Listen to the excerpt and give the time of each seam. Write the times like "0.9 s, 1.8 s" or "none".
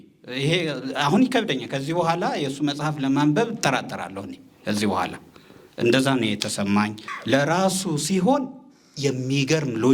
7.1 s